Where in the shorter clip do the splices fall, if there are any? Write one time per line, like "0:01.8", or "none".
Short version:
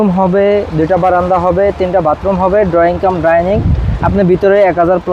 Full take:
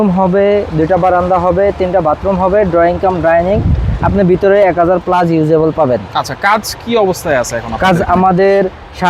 none